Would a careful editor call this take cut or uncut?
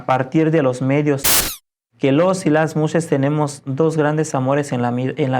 cut